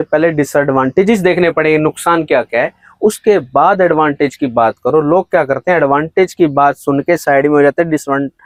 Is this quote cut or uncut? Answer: uncut